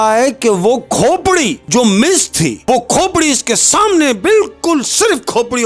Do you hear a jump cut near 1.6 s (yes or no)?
yes